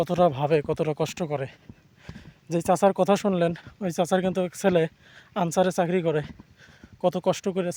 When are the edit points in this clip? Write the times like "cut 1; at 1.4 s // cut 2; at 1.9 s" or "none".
none